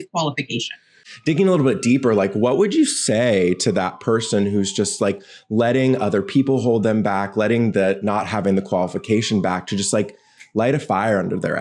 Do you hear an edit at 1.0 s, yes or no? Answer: no